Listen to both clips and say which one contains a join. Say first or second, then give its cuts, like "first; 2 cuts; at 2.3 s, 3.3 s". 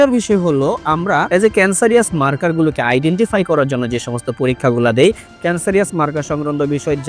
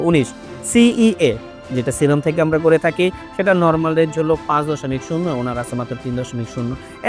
first; 1 cut; at 1.3 s